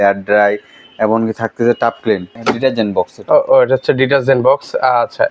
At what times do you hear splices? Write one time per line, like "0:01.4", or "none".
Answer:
0:02.3

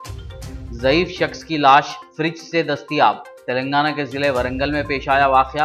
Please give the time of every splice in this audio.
none

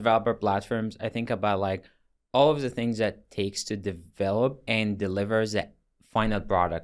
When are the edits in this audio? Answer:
0:04.6

